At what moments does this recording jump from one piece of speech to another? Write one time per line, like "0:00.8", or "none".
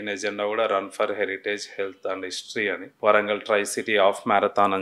0:02.9